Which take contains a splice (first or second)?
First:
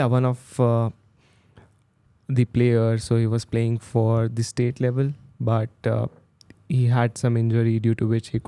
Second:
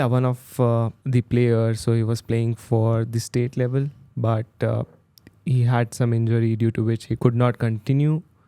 second